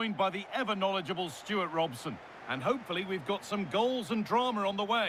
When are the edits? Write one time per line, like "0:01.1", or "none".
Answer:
none